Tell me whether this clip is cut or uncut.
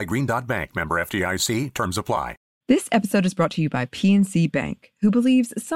cut